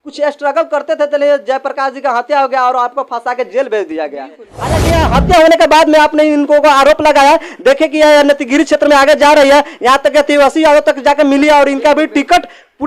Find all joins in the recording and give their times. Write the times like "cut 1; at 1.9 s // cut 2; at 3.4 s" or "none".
cut 1; at 4.8 s